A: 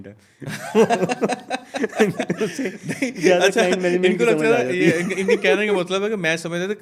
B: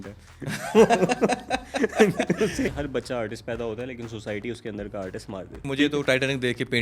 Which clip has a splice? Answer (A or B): B